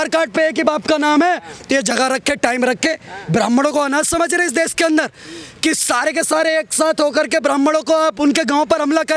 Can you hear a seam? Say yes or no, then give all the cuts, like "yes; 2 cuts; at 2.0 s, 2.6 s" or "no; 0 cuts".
no; 0 cuts